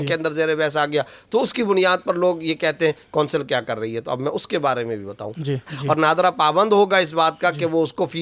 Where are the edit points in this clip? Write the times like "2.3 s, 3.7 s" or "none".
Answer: 5.7 s